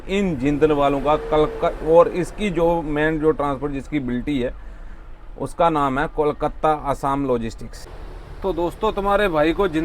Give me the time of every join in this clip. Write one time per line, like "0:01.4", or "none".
0:08.3